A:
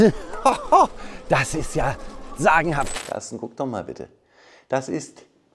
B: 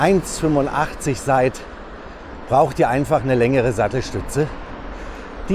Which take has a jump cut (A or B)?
A